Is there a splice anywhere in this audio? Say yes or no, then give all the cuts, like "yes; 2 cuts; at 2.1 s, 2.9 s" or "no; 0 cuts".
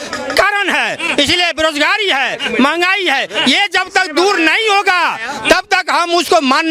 no; 0 cuts